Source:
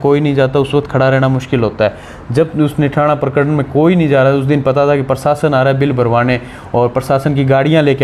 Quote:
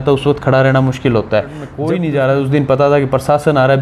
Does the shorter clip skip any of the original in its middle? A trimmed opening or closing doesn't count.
yes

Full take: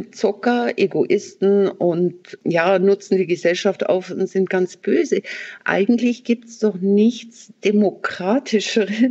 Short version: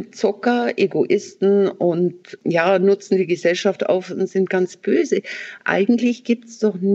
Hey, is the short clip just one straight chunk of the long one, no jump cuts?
yes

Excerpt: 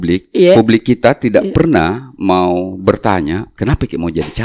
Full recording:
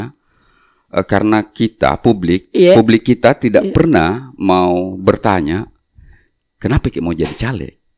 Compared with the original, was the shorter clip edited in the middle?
yes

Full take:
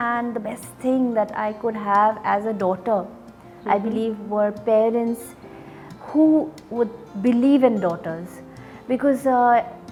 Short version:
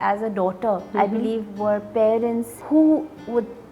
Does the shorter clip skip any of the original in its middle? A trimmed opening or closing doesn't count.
yes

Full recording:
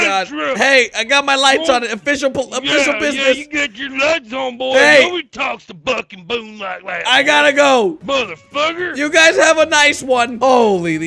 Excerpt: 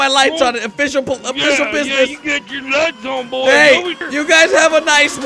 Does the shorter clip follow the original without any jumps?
no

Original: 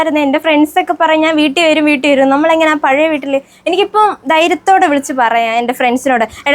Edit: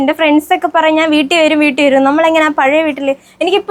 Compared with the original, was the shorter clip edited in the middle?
no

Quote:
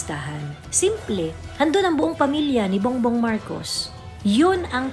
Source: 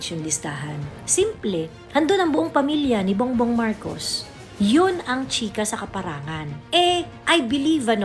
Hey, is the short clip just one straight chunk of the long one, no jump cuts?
yes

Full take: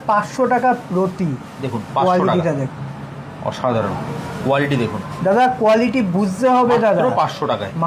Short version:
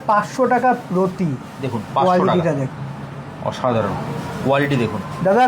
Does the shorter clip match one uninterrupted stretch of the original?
yes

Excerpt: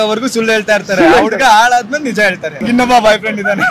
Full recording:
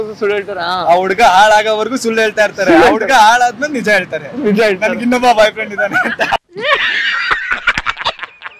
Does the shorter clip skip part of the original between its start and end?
yes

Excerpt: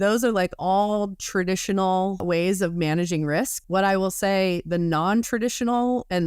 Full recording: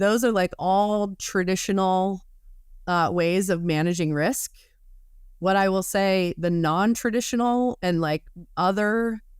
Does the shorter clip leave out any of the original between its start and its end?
yes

